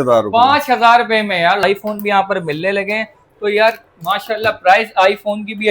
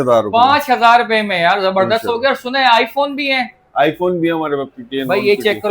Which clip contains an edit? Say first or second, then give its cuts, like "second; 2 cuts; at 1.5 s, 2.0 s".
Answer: first; 1 cut; at 1.6 s